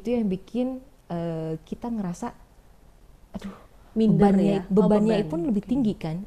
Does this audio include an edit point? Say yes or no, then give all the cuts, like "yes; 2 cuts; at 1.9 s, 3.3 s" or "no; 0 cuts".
no; 0 cuts